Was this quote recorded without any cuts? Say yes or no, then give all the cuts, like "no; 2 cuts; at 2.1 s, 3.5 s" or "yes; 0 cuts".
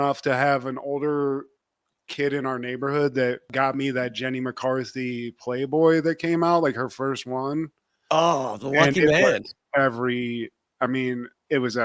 yes; 0 cuts